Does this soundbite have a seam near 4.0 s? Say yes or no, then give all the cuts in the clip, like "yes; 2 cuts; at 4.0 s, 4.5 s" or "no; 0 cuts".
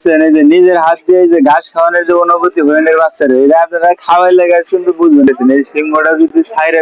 no; 1 cut; at 5.3 s